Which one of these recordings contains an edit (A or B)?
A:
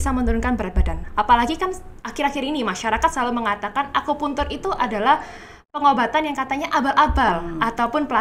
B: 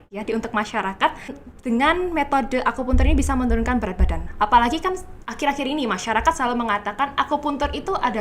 B